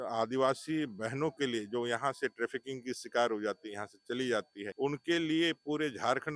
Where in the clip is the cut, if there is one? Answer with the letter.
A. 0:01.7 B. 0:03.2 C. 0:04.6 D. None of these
C